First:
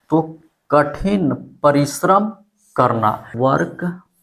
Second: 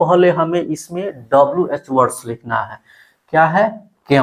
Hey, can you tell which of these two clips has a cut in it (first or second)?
first